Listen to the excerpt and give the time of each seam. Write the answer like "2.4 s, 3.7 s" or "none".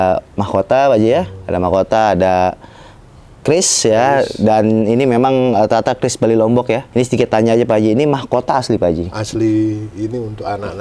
6.9 s